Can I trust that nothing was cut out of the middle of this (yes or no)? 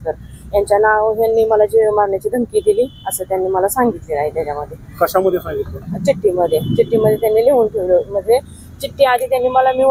yes